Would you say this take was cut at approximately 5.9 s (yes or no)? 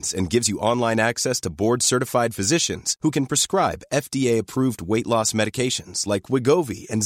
no